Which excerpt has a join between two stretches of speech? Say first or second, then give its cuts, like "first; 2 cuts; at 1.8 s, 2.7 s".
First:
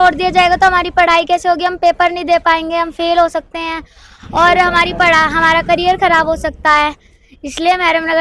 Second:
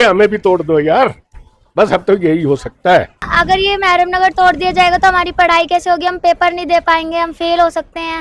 second; 1 cut; at 3.3 s